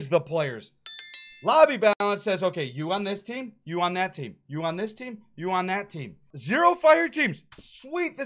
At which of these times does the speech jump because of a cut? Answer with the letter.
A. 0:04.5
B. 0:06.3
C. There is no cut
B